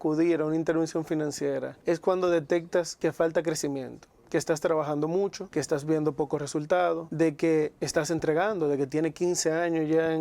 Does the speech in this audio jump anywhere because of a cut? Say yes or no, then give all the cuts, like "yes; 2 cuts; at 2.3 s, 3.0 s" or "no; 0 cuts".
yes; 4 cuts; at 1.7 s, 2.9 s, 5.4 s, 7.1 s